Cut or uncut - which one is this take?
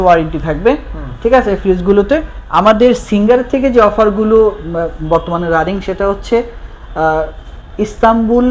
cut